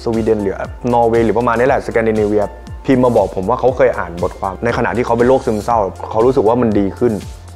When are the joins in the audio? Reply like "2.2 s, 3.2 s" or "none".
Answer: 4.5 s, 5.9 s